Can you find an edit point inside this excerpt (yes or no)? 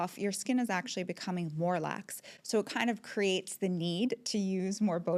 no